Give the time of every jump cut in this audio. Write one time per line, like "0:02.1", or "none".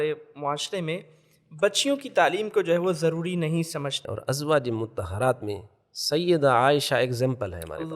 0:04.1